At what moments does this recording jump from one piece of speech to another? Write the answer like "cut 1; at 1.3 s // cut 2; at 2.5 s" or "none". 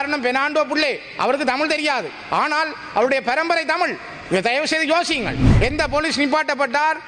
cut 1; at 5.4 s